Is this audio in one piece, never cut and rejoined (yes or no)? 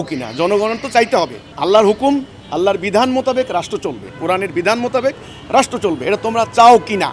no